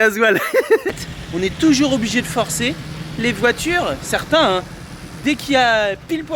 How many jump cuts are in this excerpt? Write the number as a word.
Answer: one